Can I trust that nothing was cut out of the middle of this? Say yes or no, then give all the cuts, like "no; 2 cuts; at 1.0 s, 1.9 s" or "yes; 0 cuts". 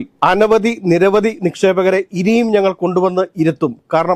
yes; 0 cuts